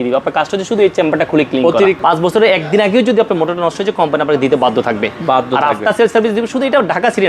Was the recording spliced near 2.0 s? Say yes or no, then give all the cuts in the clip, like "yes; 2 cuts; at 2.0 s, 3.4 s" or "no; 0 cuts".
yes; 1 cut; at 2.0 s